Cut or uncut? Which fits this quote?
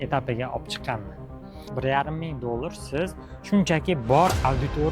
cut